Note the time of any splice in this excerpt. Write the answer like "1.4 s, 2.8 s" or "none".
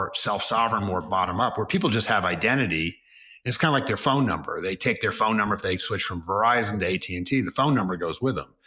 none